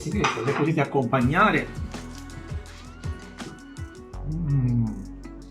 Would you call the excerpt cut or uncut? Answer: cut